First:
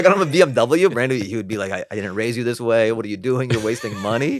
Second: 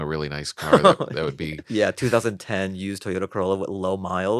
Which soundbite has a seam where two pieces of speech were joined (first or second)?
second